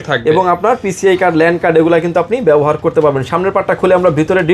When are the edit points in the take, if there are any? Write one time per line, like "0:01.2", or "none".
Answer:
none